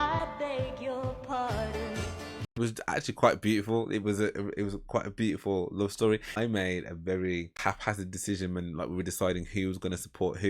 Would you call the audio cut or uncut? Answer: cut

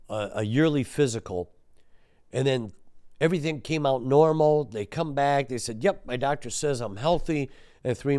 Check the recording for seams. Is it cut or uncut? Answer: uncut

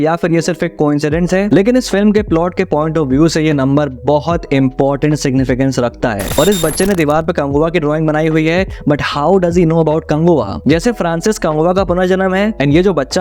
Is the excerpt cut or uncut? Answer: cut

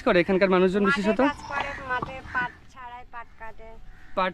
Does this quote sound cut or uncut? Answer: uncut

